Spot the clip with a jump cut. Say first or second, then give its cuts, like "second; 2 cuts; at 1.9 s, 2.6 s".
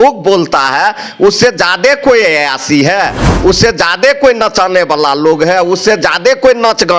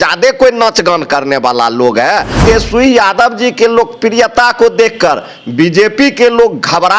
second; 1 cut; at 2.4 s